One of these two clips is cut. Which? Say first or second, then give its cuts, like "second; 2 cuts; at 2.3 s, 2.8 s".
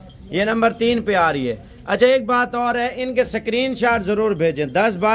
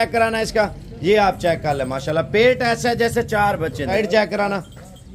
second; 1 cut; at 3.9 s